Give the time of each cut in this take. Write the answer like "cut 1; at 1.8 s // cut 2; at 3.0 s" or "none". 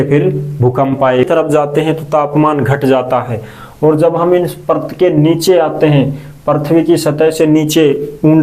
cut 1; at 1.2 s